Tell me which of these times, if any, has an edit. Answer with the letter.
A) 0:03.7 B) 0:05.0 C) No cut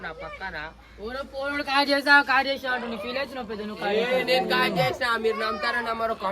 A